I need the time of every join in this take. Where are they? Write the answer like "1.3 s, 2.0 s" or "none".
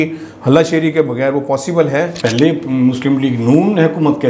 2.1 s